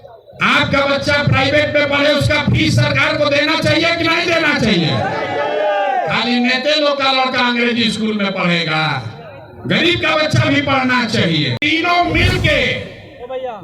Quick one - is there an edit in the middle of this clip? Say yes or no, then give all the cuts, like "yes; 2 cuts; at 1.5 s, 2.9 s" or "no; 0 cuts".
yes; 1 cut; at 11.6 s